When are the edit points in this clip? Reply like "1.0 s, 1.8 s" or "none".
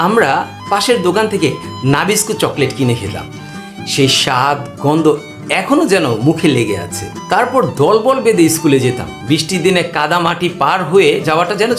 none